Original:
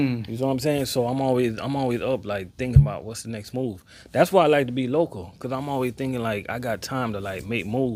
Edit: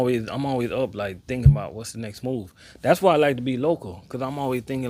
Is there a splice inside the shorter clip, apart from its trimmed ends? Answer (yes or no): no